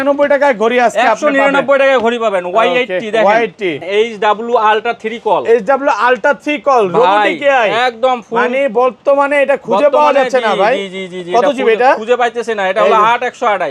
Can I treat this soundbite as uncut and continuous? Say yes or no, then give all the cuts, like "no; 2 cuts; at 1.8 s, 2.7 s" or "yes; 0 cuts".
no; 1 cut; at 3.8 s